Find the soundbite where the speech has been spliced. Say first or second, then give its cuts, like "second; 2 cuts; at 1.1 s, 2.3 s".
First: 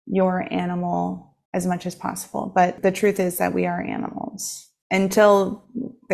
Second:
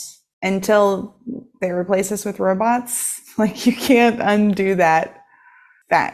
first; 2 cuts; at 1.3 s, 2.8 s